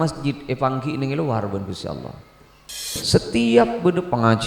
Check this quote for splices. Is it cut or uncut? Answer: cut